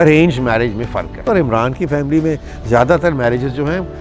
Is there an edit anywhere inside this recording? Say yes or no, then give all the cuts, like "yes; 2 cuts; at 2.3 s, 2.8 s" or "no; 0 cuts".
yes; 1 cut; at 1.2 s